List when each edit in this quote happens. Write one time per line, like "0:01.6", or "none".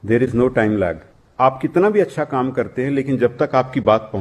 0:01.2

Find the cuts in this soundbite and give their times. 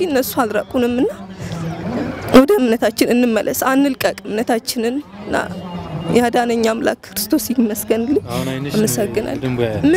none

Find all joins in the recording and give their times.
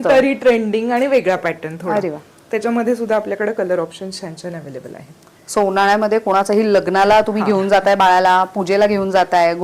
none

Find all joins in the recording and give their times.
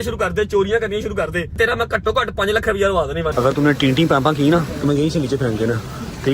0:01.6
0:03.3

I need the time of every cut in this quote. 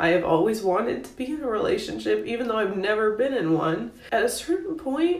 0:04.0

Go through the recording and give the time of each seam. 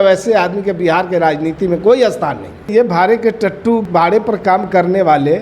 0:02.7
0:03.8

